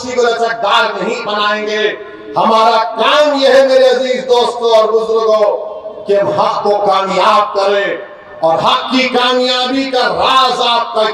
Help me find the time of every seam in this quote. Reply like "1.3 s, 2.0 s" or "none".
none